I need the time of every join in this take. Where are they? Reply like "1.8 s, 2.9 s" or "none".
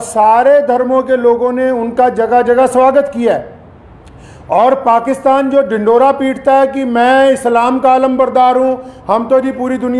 none